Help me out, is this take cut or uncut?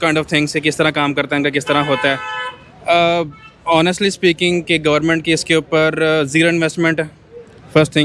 uncut